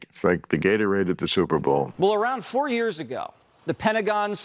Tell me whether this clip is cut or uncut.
cut